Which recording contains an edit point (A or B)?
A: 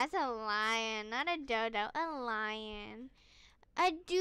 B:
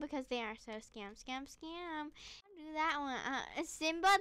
B